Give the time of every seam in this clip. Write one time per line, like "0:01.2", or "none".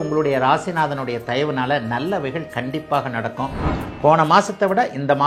0:03.7